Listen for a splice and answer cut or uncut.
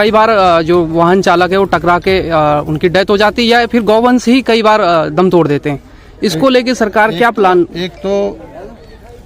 uncut